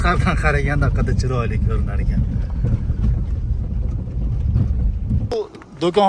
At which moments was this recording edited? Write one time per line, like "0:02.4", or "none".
none